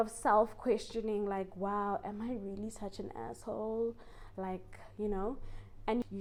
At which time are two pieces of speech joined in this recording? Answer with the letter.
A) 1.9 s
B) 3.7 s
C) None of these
C